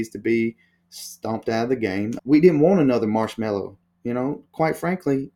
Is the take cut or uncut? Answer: cut